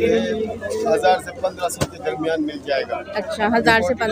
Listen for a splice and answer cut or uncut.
uncut